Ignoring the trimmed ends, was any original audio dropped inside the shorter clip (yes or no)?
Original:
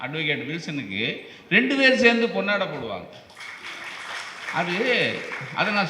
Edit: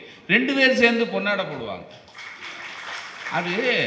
no